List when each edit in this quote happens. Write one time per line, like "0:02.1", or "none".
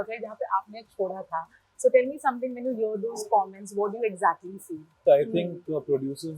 0:05.0